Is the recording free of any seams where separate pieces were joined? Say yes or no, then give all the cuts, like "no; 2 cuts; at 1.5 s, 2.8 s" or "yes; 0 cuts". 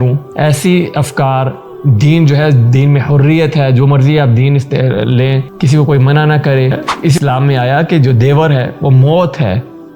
no; 1 cut; at 7.1 s